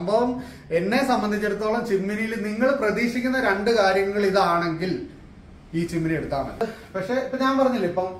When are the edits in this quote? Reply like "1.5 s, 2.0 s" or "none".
6.6 s